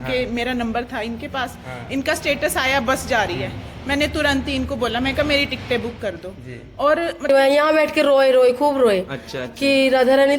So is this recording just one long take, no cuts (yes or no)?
no